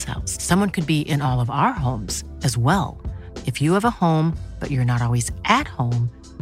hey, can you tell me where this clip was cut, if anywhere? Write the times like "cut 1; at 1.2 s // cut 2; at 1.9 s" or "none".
none